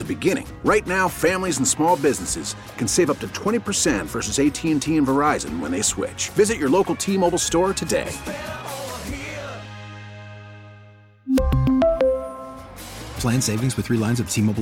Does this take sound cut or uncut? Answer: uncut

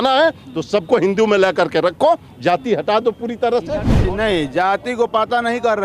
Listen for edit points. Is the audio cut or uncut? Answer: cut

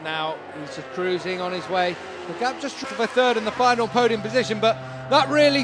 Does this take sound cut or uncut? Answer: cut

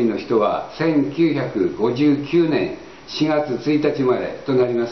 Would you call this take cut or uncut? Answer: uncut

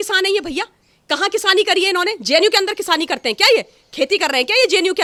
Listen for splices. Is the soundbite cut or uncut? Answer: uncut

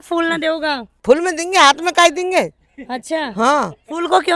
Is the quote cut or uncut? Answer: uncut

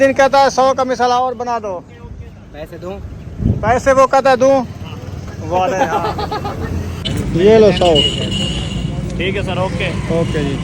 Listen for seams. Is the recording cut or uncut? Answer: uncut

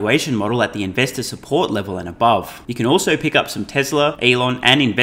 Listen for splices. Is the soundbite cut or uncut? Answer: cut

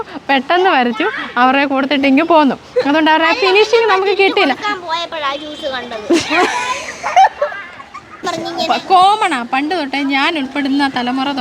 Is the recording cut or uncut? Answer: cut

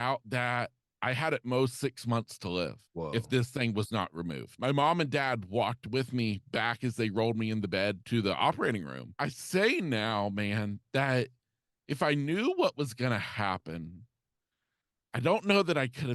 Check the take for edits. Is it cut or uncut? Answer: cut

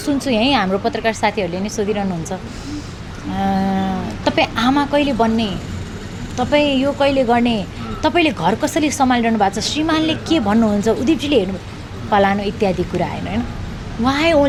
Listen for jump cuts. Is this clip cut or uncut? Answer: uncut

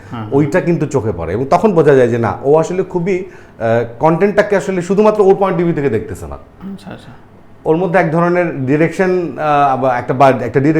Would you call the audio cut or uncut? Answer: uncut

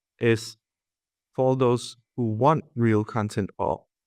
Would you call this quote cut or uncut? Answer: uncut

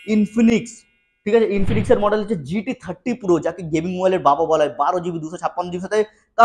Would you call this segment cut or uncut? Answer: uncut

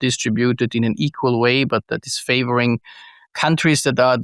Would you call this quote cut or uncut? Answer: uncut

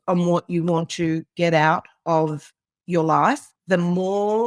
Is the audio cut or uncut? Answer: cut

